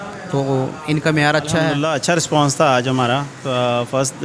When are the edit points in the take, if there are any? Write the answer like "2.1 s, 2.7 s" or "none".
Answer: 1.7 s